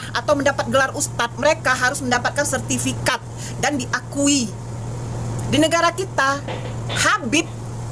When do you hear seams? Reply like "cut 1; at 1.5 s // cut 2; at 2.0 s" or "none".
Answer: none

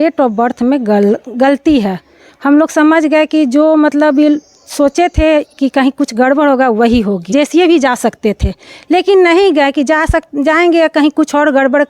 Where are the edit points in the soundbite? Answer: cut 1; at 7.3 s

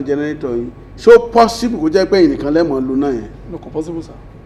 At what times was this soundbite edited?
none

